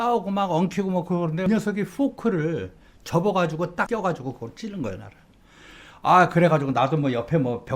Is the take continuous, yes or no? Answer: no